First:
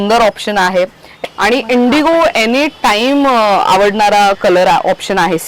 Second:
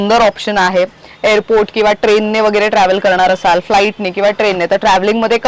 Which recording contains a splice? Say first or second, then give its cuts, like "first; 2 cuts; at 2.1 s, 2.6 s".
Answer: first; 1 cut; at 1.0 s